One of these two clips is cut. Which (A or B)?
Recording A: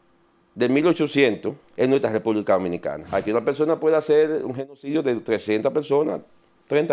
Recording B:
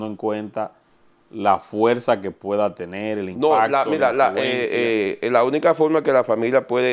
A